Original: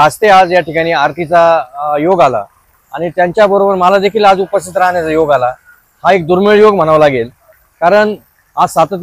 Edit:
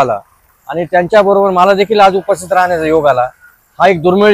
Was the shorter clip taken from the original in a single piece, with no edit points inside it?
yes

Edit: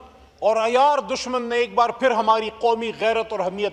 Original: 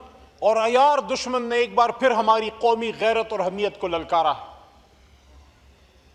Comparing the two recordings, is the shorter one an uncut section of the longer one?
yes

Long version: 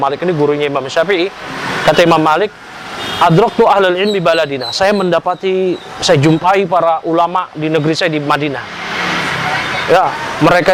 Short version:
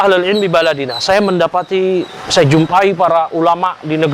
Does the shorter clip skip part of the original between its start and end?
no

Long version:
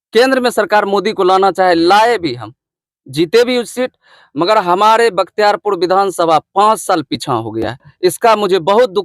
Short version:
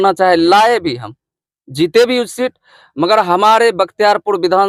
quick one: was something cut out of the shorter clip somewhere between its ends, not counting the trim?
no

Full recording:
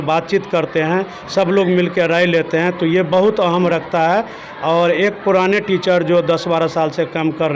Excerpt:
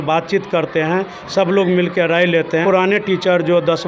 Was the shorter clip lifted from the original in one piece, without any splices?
no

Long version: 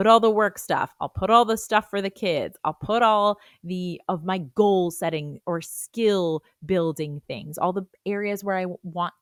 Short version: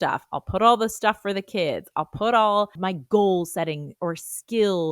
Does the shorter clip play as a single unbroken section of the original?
no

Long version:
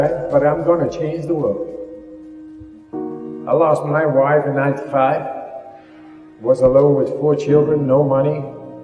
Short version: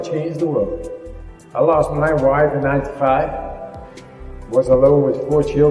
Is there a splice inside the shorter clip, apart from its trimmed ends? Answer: yes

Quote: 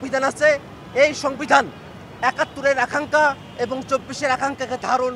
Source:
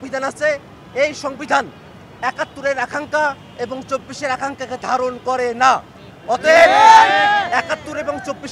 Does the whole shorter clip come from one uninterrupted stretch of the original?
yes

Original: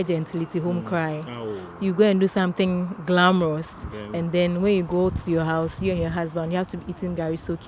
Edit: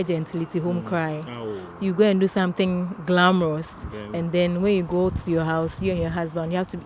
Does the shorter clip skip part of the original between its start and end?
no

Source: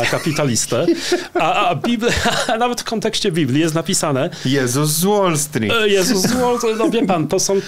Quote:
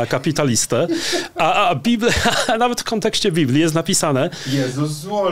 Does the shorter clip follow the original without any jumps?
yes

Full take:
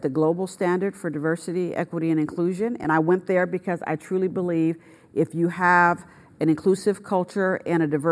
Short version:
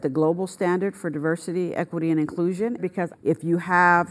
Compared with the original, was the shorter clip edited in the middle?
yes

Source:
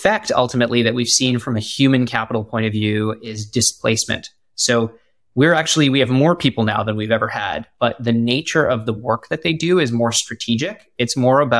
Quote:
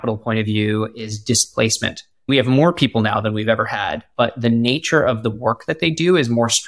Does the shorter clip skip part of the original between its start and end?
yes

